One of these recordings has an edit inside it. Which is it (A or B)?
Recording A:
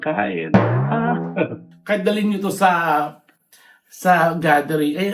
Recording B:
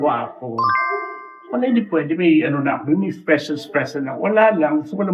A